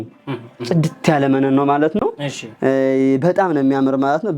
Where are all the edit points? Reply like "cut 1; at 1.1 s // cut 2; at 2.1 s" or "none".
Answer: none